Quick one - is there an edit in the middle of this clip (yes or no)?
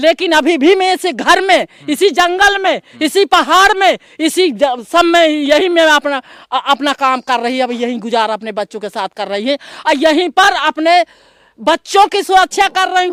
no